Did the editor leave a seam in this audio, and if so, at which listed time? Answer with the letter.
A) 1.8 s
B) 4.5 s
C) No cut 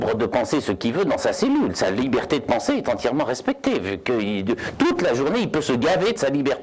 C